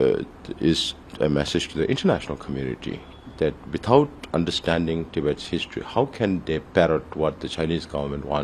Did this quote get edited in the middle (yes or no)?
no